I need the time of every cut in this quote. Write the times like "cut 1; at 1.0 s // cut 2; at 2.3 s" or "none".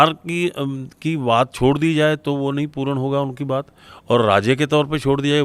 none